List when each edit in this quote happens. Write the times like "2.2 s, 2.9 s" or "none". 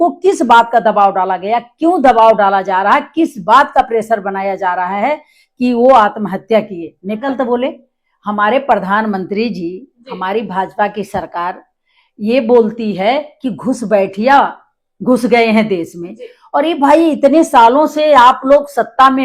7.2 s